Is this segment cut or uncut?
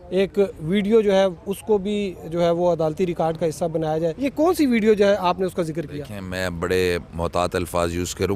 cut